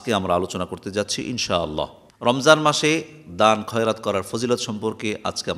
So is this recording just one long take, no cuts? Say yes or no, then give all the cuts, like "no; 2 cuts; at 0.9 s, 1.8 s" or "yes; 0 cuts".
no; 1 cut; at 2.1 s